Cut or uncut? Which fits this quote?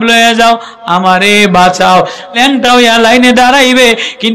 cut